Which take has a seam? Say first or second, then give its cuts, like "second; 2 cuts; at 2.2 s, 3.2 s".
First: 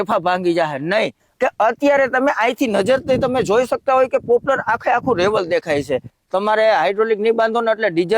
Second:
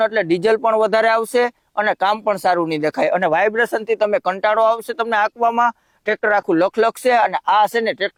first; 2 cuts; at 1.2 s, 6.1 s